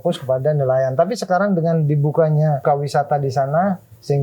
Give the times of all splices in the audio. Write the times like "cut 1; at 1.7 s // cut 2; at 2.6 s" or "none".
cut 1; at 2.6 s